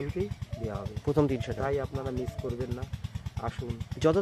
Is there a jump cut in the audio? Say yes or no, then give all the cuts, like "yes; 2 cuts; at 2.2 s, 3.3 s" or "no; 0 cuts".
no; 0 cuts